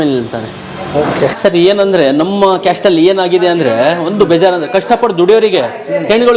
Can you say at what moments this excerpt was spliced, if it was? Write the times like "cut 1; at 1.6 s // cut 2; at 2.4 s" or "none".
cut 1; at 1.4 s